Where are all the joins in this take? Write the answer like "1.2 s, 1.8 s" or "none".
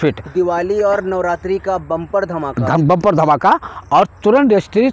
none